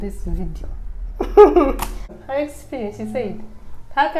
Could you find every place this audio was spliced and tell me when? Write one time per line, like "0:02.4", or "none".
0:02.1